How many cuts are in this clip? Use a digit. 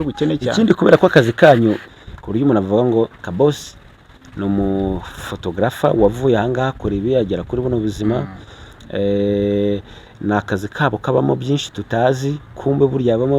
1